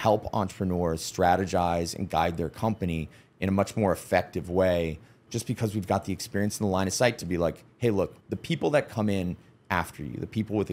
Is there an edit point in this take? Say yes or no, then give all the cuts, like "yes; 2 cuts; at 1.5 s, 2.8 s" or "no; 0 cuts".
yes; 2 cuts; at 5.2 s, 8.3 s